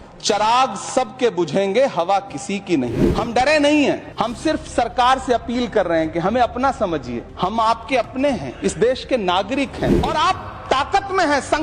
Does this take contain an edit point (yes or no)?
yes